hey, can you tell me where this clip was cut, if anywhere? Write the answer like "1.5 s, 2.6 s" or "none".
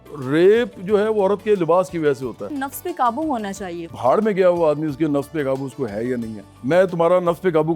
2.4 s, 3.9 s, 6.4 s

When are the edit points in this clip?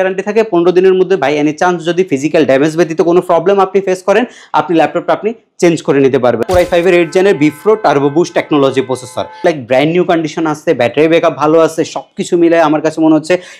6.4 s, 9.4 s

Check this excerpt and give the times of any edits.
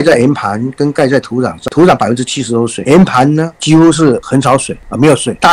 1.6 s, 2.8 s

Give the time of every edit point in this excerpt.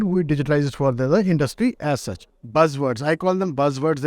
2.3 s

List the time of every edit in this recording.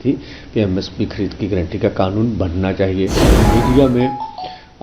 3.3 s

